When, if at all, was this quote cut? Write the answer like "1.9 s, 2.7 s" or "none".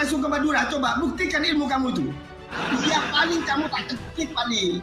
2.5 s